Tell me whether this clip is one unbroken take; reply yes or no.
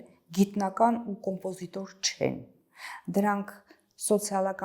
yes